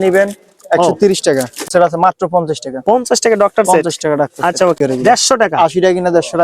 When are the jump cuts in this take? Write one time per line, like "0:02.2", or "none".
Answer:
0:01.7
0:04.8